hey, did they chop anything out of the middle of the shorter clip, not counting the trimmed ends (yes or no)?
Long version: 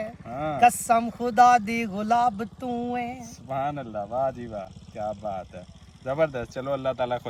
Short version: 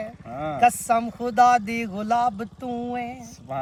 no